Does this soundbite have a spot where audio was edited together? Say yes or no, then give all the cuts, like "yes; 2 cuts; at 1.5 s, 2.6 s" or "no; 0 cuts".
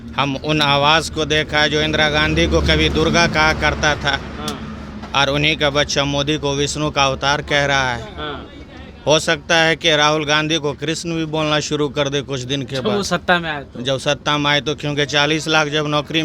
no; 0 cuts